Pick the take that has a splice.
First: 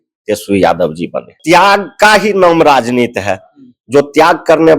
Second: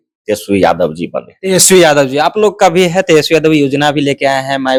first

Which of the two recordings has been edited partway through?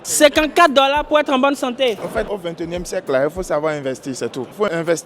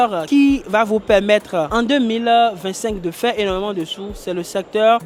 first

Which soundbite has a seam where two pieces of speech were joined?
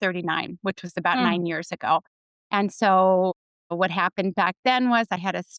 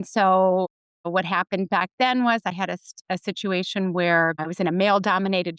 second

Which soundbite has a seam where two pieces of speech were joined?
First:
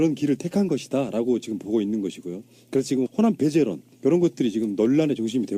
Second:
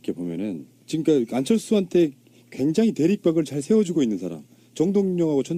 first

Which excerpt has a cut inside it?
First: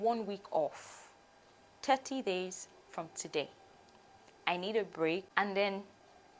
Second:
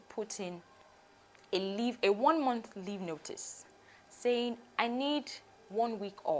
first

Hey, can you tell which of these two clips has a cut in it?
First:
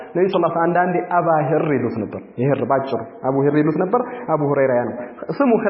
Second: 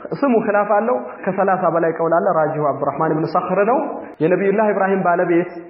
second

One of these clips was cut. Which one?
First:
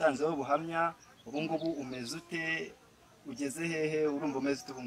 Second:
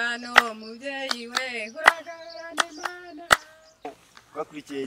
second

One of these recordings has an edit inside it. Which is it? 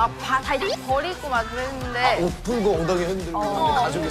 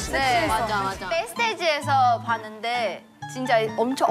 second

